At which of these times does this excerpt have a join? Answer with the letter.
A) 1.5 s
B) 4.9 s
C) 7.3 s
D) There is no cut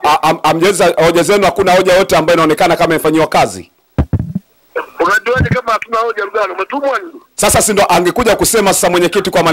D